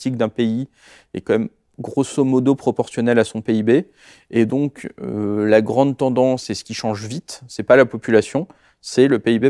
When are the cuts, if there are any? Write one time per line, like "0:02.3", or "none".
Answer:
none